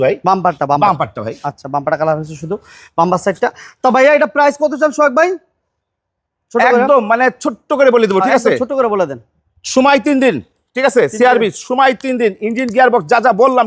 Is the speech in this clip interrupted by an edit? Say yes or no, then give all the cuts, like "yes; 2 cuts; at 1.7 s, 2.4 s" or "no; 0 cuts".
no; 0 cuts